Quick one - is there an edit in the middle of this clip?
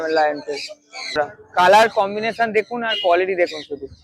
yes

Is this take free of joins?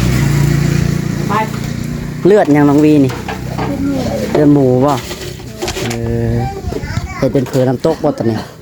yes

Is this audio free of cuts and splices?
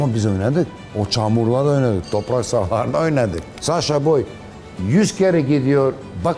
no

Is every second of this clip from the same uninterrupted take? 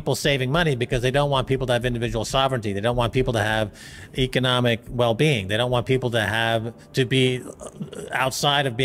yes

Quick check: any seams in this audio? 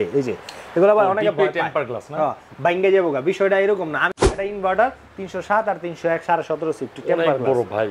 yes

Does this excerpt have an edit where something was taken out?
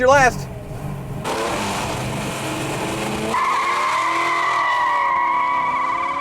yes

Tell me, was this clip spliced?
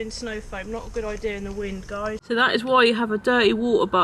yes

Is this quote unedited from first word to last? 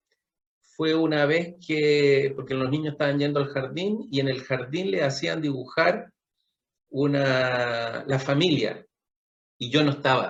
yes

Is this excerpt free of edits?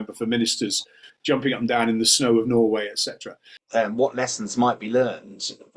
no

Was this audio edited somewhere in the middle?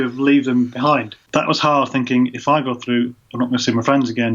yes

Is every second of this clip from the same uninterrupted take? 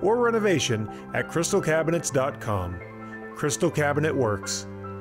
yes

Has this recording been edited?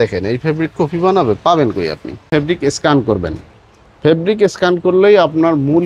yes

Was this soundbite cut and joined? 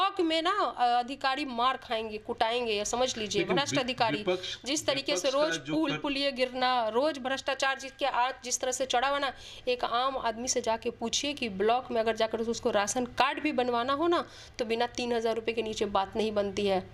no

